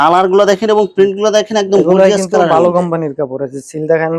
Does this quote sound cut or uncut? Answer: uncut